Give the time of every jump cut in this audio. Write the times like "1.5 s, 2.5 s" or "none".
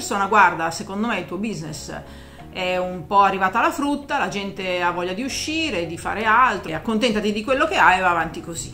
6.7 s